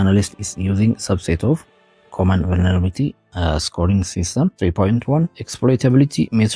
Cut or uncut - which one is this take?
cut